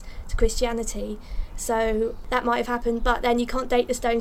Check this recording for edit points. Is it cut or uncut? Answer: cut